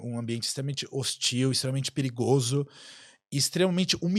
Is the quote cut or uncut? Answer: uncut